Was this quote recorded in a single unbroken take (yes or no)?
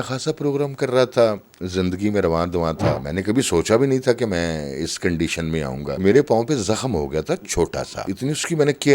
no